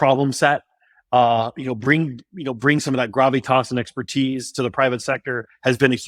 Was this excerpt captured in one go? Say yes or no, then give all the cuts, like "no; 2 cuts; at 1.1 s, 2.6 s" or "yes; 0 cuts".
yes; 0 cuts